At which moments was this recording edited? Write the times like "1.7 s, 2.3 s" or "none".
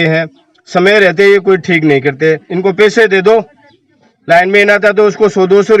2.5 s